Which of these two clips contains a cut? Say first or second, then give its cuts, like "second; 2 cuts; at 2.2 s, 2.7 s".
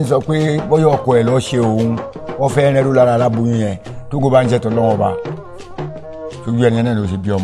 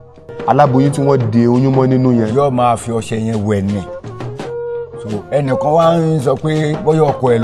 second; 2 cuts; at 3.8 s, 5.0 s